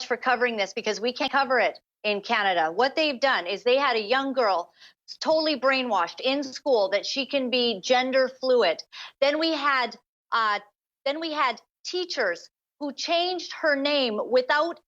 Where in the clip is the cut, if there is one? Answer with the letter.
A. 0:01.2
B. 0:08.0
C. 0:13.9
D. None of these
A